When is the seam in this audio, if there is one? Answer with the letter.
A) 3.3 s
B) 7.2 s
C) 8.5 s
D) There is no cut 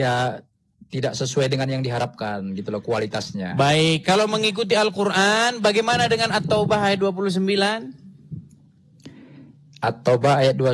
D